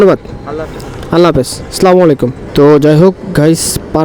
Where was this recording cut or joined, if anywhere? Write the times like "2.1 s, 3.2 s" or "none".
2.4 s